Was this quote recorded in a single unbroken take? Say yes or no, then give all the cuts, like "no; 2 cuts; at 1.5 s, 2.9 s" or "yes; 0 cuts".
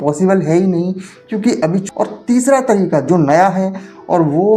no; 1 cut; at 1.8 s